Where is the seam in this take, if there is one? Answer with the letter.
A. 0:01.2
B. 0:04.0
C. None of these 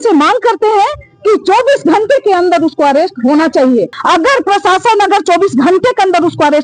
B